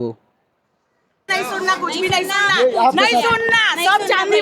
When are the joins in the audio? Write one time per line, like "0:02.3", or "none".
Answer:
0:01.3